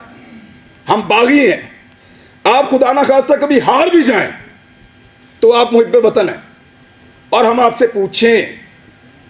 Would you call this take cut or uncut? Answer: uncut